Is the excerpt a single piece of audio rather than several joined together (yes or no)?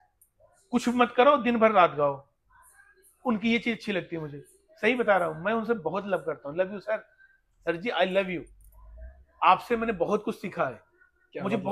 yes